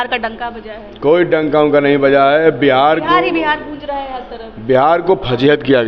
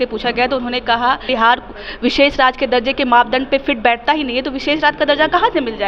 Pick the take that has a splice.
second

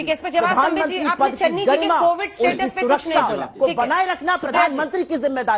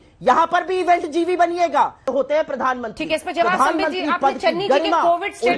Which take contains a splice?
second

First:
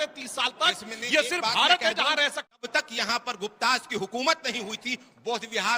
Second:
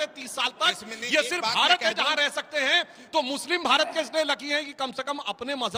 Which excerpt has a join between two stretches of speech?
first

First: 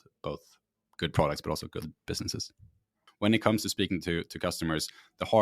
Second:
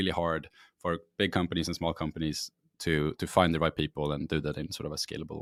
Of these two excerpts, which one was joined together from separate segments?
first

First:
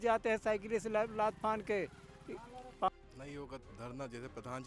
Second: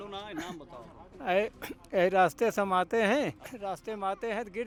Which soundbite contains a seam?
first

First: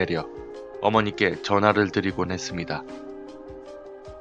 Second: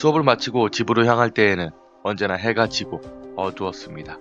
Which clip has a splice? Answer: second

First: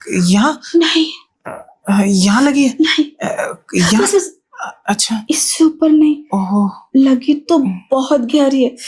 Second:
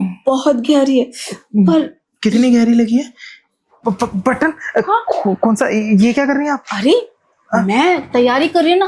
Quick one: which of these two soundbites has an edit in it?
second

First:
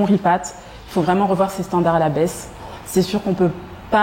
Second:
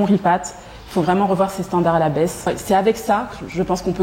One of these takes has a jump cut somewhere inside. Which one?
second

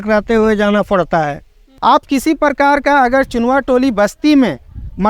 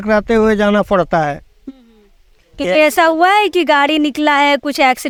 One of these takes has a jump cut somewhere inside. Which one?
first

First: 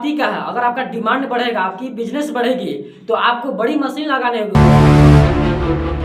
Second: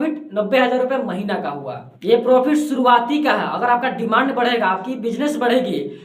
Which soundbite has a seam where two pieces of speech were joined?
first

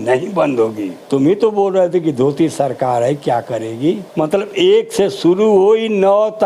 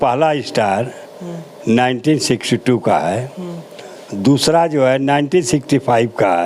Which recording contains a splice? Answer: first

